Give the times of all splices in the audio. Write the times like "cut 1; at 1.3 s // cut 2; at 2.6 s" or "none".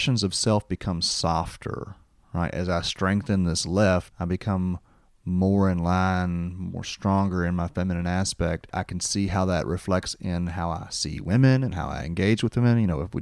cut 1; at 4.1 s // cut 2; at 8.7 s